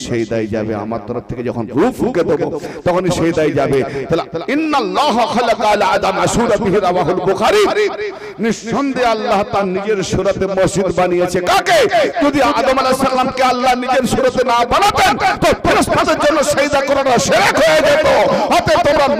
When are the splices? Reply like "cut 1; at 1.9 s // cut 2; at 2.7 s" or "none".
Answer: none